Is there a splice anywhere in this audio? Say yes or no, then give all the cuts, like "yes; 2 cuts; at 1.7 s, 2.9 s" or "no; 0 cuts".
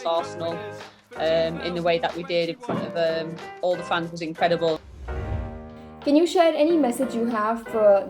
yes; 1 cut; at 5.4 s